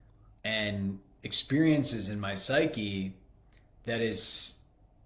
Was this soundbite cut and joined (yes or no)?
no